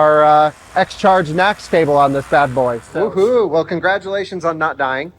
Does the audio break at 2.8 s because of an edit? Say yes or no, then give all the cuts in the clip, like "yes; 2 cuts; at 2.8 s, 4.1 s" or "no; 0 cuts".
yes; 1 cut; at 2.8 s